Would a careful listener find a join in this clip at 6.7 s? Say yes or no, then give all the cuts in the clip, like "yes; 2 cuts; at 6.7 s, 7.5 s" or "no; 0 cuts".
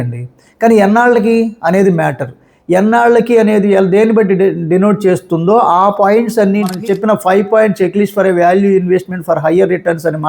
yes; 1 cut; at 6.7 s